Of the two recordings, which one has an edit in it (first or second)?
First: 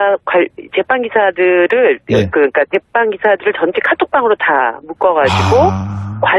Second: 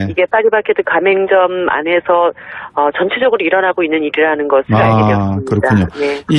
second